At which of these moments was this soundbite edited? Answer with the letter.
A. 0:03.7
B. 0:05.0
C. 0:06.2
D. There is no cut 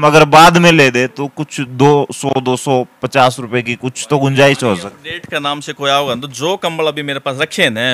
D